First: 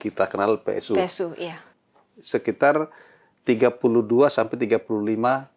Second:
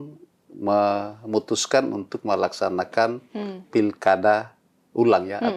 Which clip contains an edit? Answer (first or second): first